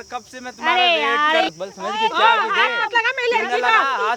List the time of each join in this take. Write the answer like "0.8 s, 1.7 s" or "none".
1.5 s